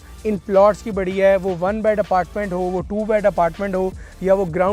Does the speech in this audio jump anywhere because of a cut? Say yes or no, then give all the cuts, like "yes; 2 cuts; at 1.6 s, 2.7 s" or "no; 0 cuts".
no; 0 cuts